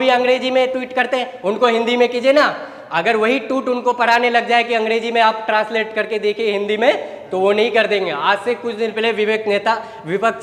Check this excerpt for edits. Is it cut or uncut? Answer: uncut